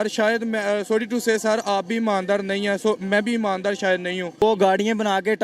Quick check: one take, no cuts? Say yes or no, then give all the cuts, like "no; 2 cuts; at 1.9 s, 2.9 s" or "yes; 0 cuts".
no; 1 cut; at 4.4 s